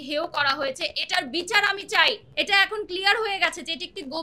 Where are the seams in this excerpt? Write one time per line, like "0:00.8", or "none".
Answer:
0:02.3